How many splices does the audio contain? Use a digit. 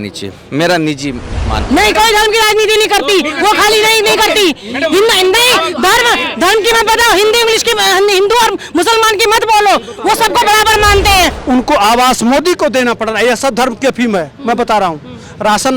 2